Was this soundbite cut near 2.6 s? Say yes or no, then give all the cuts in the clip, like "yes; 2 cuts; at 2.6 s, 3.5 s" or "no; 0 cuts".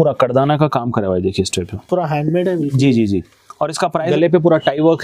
no; 1 cut; at 4.1 s